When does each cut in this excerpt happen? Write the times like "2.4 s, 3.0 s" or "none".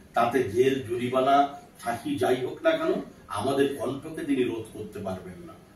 none